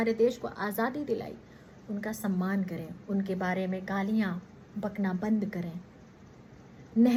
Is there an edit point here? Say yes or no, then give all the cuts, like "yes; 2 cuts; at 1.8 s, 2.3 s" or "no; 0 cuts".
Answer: no; 0 cuts